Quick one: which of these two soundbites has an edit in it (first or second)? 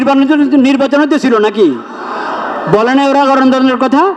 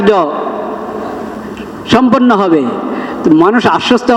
second